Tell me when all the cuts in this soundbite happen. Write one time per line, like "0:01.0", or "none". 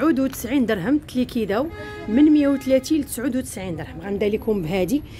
none